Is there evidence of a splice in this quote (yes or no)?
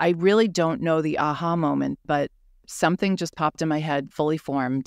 no